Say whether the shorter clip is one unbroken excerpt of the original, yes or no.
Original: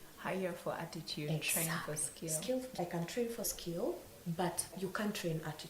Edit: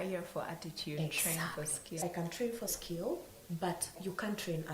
no